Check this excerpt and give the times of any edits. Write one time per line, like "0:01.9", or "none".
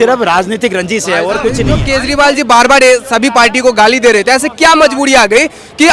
0:01.7